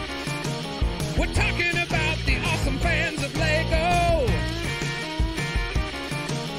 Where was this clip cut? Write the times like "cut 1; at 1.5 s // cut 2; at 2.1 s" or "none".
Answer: none